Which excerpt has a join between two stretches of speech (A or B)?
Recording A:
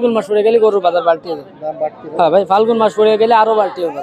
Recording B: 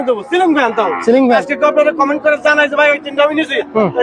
B